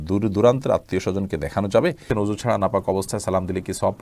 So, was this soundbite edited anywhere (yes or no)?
yes